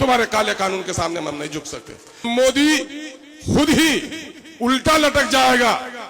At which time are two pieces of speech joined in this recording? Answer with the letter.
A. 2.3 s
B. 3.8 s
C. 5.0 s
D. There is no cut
A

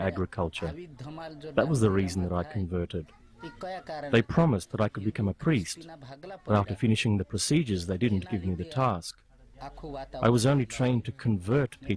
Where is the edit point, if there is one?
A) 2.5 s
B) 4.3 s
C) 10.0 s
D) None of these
A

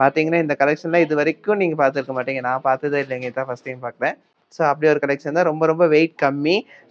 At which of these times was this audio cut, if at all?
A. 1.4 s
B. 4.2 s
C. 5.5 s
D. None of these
D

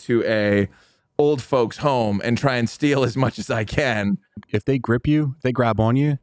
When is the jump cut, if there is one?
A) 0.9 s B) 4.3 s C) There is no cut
B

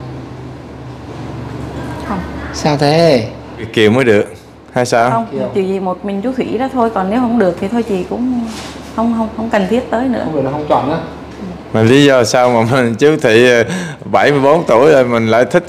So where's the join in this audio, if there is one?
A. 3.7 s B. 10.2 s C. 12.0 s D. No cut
A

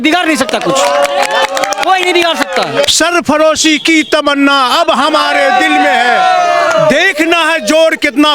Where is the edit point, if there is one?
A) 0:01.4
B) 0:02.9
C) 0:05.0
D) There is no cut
B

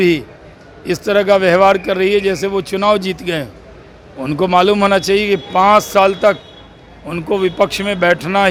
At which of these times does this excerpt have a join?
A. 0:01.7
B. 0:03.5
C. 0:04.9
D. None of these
D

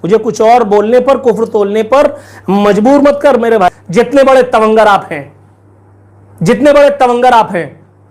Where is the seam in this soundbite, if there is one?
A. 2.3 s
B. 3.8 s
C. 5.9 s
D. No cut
B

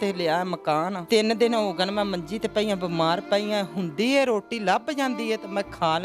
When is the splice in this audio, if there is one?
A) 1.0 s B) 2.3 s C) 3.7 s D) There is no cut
A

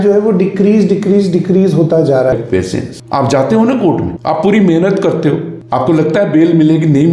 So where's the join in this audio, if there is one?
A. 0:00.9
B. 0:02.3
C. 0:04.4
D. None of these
B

